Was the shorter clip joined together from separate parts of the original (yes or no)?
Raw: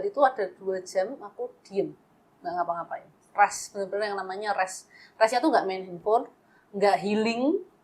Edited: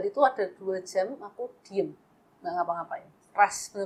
no